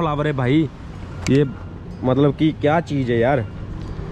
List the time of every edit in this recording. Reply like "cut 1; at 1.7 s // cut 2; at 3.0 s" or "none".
none